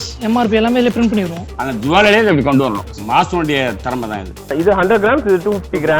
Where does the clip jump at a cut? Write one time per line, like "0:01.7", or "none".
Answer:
0:01.4
0:04.4